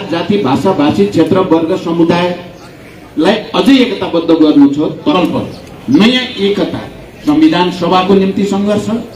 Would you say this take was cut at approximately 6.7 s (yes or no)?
no